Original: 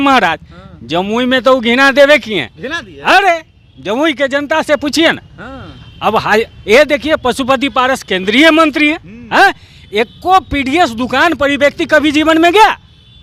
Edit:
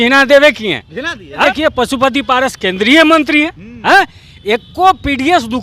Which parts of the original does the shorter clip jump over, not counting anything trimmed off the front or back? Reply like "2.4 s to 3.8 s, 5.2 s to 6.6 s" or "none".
3.1 s to 6.9 s